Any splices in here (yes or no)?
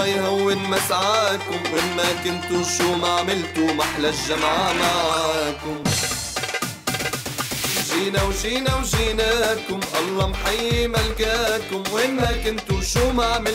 no